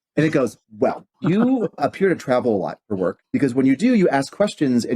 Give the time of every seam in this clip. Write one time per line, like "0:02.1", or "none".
0:01.1
0:01.8
0:03.2